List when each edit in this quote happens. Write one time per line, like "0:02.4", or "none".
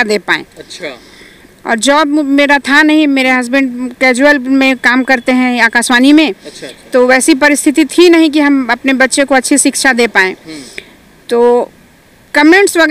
none